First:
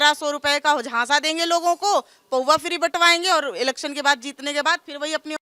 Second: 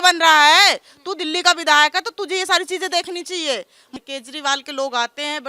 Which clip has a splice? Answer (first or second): second